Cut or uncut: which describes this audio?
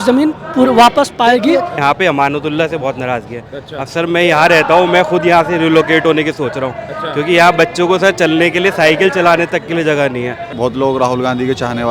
cut